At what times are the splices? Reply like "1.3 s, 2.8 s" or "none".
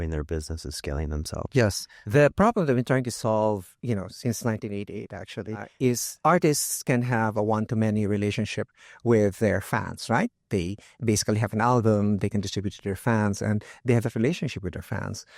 1.9 s, 6.0 s